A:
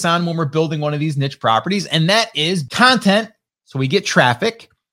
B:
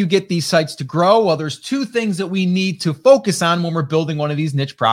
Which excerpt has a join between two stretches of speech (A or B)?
A